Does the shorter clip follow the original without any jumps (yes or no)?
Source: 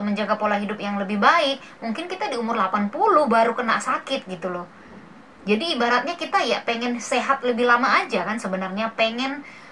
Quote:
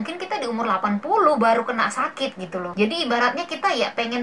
no